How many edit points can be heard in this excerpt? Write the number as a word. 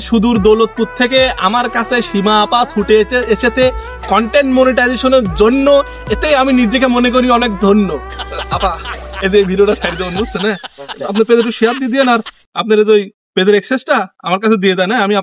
zero